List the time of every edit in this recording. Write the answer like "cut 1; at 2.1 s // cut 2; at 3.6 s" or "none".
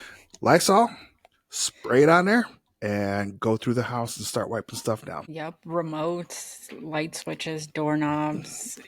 cut 1; at 5.2 s